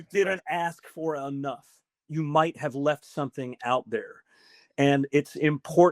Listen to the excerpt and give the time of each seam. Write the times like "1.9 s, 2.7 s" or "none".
2.0 s